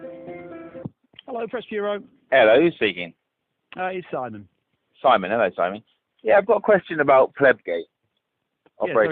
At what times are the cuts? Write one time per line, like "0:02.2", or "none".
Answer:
0:06.9

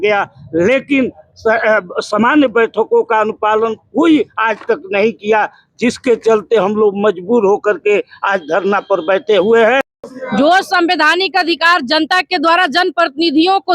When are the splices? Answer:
0:10.0

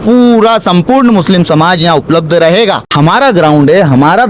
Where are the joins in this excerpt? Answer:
0:02.8

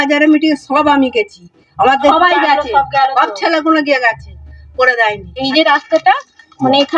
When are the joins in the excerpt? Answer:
0:02.1
0:05.3

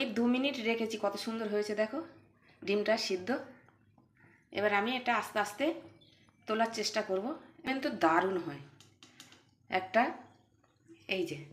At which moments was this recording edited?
0:07.7

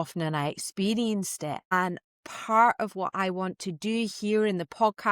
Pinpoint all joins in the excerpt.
0:02.0

